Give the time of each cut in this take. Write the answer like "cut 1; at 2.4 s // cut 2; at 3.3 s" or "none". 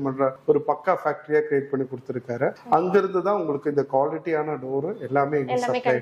none